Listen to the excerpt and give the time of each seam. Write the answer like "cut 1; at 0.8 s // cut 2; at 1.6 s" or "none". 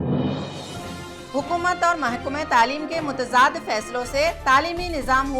cut 1; at 1.0 s